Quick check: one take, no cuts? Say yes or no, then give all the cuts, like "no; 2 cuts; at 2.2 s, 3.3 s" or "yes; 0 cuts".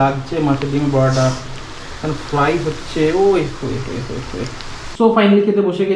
yes; 0 cuts